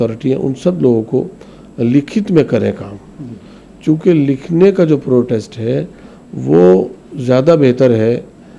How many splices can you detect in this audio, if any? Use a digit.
0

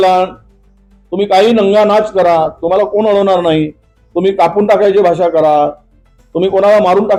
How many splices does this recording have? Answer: 0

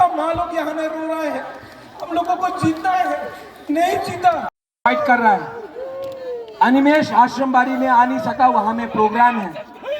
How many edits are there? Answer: 1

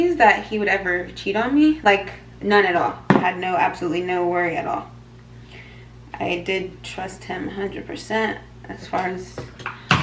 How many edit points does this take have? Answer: 0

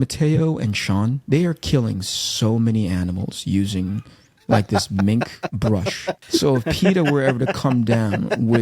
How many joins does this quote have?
2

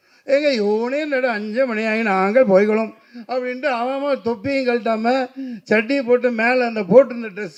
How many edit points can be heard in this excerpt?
0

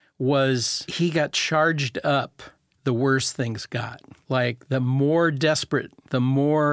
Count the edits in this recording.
1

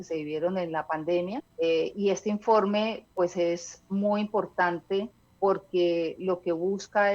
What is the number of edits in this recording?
2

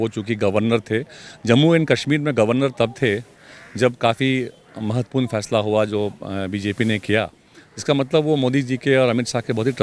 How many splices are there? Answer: 0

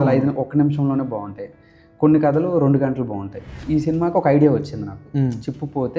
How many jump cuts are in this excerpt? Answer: 1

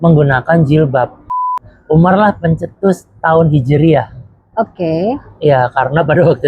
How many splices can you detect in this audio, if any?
1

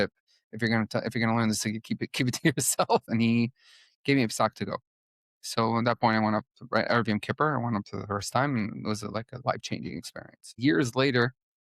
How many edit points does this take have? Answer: 2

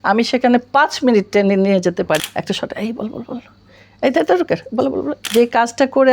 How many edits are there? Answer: 2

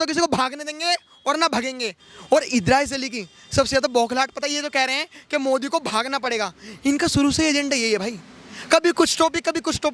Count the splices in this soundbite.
0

